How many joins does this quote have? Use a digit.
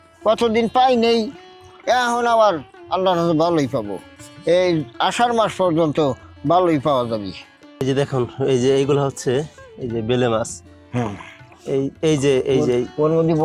1